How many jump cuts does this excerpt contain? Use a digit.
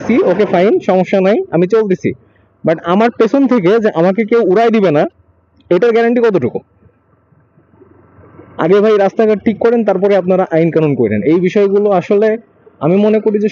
0